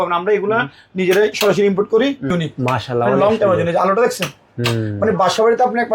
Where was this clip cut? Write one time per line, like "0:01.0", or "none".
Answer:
0:02.3